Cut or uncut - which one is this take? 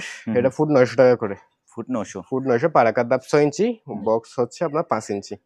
uncut